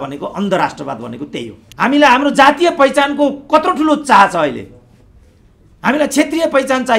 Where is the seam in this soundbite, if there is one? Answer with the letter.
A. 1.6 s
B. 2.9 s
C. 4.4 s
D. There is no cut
A